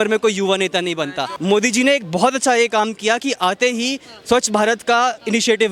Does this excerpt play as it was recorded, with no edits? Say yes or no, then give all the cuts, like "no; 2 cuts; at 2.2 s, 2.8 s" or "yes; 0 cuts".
no; 1 cut; at 1.3 s